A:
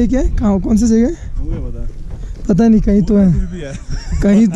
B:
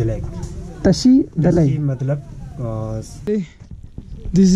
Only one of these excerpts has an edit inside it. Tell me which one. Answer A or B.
B